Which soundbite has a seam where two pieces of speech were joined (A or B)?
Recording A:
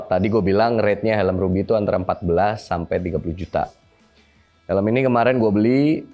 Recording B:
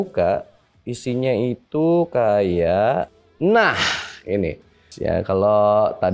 B